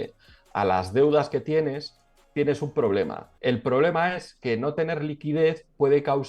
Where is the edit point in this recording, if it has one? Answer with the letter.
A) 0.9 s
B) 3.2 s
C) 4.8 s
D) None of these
B